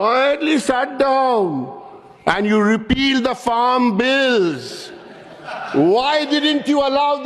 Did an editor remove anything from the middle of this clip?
no; 0 cuts

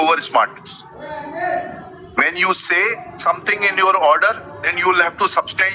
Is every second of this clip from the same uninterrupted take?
yes; 0 cuts

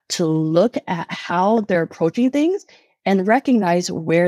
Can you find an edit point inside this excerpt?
no; 0 cuts

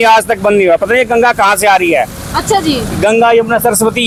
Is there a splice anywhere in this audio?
no; 0 cuts

